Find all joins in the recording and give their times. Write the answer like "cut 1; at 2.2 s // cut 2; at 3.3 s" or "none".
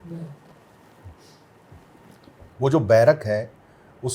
cut 1; at 2.5 s